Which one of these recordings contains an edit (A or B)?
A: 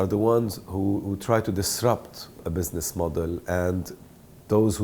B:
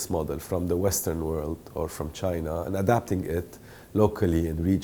A